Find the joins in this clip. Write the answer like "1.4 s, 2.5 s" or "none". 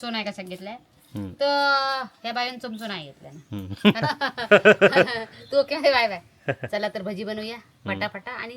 4.0 s